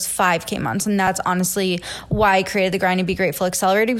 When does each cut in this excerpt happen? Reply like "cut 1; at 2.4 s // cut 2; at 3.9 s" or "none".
cut 1; at 1.1 s